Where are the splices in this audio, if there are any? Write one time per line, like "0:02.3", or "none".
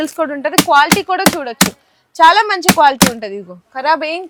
none